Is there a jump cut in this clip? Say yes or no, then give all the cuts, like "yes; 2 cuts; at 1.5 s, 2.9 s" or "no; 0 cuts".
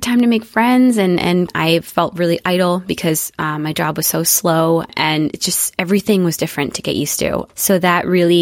yes; 3 cuts; at 1.5 s, 4.9 s, 7.5 s